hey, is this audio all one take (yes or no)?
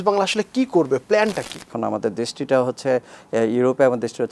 no